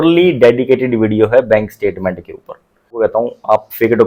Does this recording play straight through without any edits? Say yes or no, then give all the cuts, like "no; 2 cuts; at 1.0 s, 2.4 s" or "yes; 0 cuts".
no; 1 cut; at 2.9 s